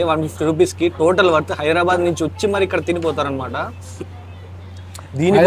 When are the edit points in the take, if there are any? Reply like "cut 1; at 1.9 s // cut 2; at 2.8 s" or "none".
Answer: none